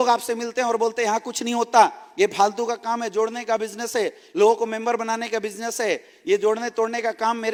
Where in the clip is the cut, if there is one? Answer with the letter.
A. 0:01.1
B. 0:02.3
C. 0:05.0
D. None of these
D